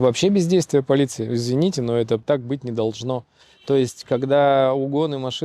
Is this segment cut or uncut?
cut